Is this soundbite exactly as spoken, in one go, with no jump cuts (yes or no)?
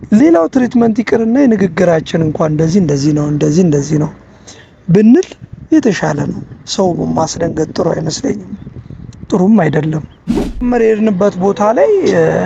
no